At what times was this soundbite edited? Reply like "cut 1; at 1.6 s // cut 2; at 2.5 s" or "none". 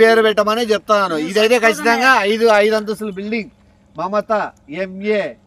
none